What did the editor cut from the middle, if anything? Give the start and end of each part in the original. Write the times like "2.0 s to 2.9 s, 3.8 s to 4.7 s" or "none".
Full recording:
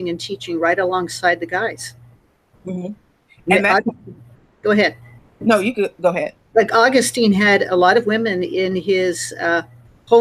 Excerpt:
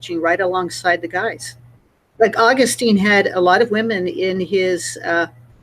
2.4 s to 6.4 s